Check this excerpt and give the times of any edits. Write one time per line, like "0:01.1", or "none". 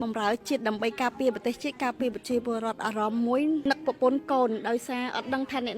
0:03.6